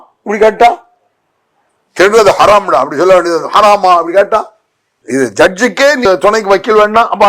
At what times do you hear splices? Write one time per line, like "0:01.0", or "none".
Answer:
0:06.1